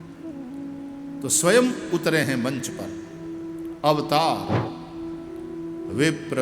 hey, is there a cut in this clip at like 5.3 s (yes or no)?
no